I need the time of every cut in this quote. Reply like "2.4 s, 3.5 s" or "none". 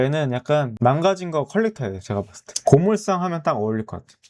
2.4 s